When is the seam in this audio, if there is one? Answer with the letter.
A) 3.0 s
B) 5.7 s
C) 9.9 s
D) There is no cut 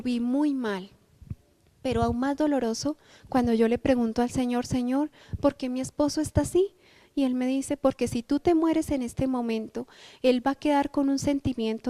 B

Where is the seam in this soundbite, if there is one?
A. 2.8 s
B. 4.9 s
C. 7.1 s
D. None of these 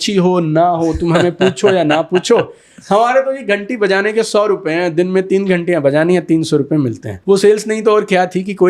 C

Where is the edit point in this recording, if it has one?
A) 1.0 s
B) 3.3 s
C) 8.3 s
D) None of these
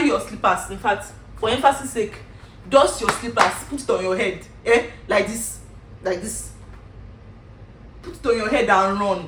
D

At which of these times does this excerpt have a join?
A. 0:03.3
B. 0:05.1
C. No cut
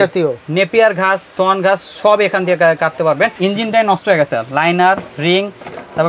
A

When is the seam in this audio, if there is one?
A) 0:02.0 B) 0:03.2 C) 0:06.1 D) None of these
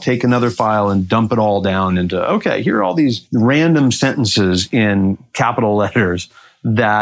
B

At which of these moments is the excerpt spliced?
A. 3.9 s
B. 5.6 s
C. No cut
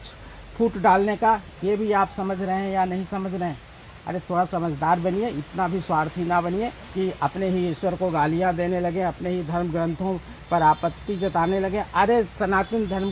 C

